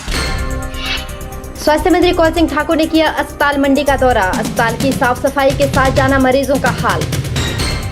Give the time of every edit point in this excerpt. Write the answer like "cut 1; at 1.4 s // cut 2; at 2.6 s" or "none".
cut 1; at 1.2 s